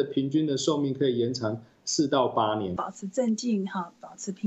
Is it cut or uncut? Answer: cut